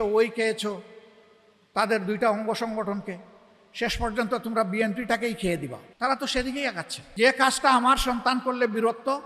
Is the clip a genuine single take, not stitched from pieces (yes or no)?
no